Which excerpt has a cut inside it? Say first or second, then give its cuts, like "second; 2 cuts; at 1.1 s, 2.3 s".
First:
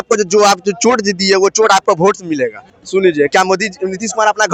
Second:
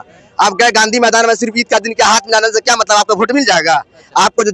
first; 1 cut; at 2.7 s